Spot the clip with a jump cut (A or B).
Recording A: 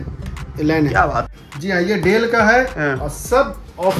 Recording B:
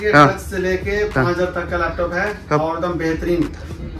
A